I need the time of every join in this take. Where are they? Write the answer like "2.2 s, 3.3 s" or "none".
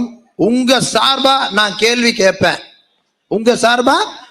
none